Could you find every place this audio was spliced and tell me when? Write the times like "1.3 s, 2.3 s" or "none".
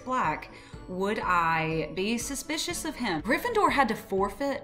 3.2 s